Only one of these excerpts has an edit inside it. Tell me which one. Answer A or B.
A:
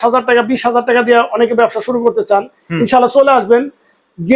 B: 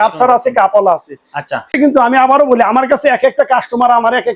B